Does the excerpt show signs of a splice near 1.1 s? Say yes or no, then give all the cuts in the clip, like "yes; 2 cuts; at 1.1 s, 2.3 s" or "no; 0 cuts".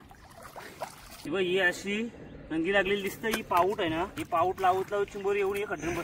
yes; 2 cuts; at 1.1 s, 4.2 s